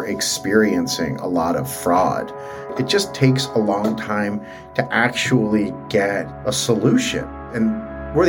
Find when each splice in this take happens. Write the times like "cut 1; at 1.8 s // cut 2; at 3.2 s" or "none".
cut 1; at 2.7 s // cut 2; at 6.3 s // cut 3; at 7.4 s

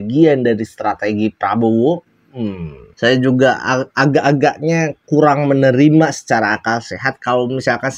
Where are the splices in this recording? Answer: cut 1; at 2.8 s

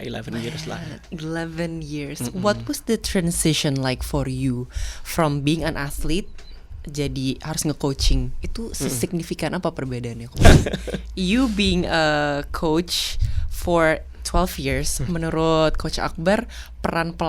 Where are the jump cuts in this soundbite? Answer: cut 1; at 10.4 s

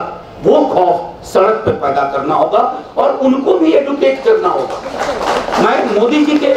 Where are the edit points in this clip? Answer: none

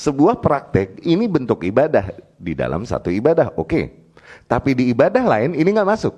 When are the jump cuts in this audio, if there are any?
none

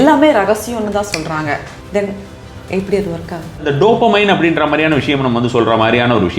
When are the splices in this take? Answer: cut 1; at 1.7 s // cut 2; at 3.7 s

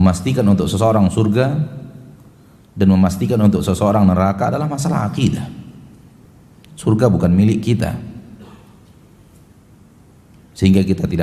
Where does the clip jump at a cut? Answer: none

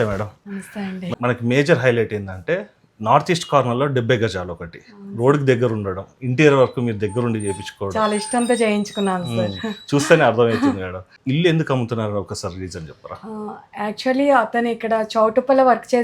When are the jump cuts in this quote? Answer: cut 1; at 1.1 s // cut 2; at 11.1 s

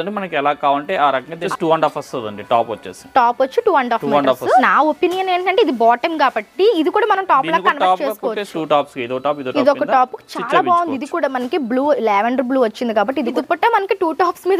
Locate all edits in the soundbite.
cut 1; at 1.4 s // cut 2; at 4.6 s // cut 3; at 8.5 s // cut 4; at 13.4 s

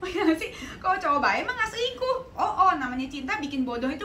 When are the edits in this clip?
none

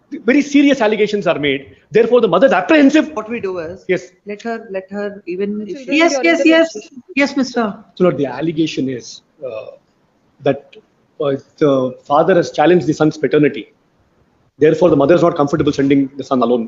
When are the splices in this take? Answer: cut 1; at 5.8 s

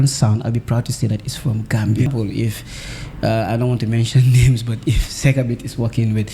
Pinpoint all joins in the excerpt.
cut 1; at 2.1 s

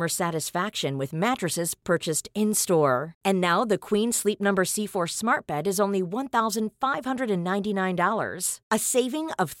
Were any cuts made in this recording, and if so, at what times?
none

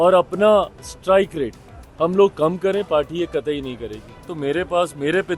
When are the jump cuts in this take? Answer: cut 1; at 4.3 s

